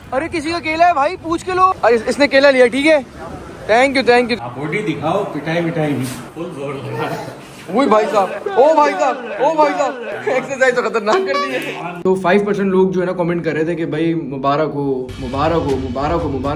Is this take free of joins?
no; 2 cuts; at 4.3 s, 11.8 s

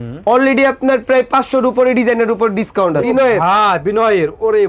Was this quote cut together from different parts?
yes; 1 cut; at 3.0 s

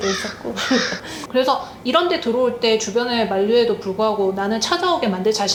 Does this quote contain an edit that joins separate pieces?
no; 0 cuts

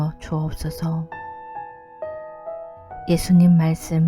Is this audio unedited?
no; 2 cuts; at 1.1 s, 3.0 s

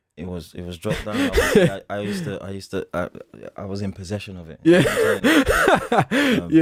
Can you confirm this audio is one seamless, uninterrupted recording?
yes; 0 cuts

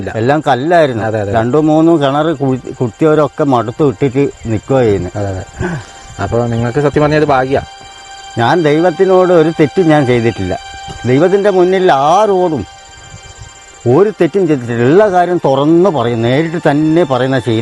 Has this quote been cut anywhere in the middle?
no; 0 cuts

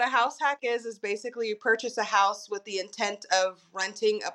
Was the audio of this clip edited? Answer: no; 0 cuts

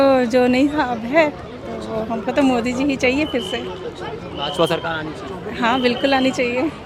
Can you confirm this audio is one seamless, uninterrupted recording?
yes; 0 cuts

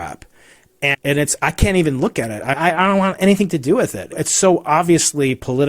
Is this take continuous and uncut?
no; 3 cuts; at 0.9 s, 2.6 s, 4.2 s

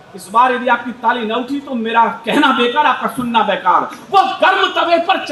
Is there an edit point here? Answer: no; 0 cuts

